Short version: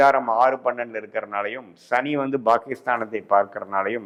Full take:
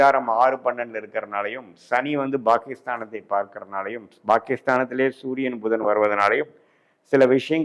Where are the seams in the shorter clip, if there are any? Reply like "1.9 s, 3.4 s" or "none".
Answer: none